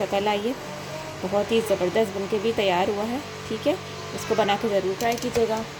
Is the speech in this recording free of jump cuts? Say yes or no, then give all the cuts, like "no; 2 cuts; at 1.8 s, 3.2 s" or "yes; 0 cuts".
yes; 0 cuts